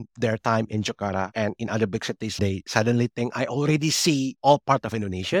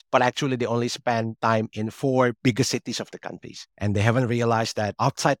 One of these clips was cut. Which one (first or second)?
first